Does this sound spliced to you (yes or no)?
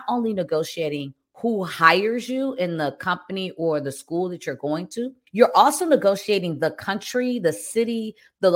no